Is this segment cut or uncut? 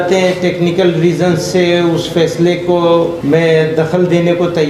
cut